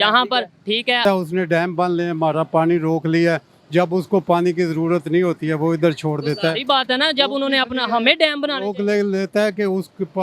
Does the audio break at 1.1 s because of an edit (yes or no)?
yes